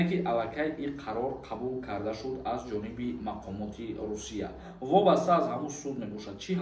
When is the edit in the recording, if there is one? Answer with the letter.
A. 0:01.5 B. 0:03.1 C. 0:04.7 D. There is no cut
C